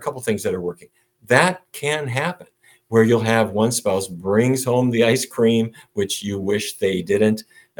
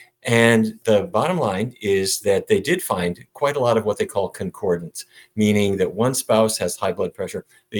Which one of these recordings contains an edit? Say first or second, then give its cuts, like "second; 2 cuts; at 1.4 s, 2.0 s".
second; 2 cuts; at 0.8 s, 3.2 s